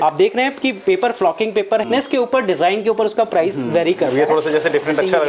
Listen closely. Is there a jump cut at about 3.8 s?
no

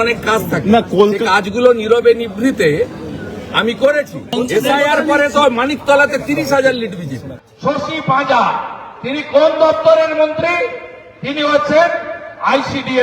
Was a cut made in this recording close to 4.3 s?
yes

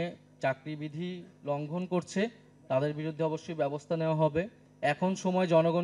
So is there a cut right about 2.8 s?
no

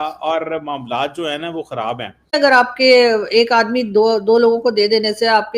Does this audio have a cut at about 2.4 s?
yes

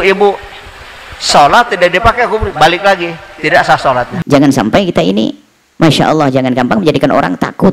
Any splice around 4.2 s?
yes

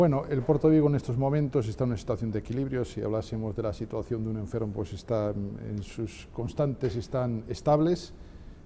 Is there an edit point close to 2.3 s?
no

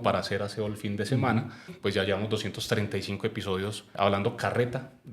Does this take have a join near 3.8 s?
yes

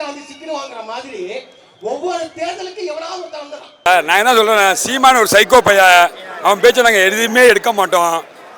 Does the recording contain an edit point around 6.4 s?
no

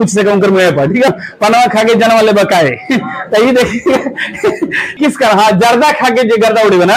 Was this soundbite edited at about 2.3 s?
no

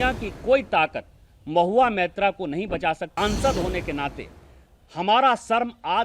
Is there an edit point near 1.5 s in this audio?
no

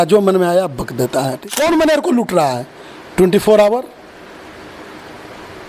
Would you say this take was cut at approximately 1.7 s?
yes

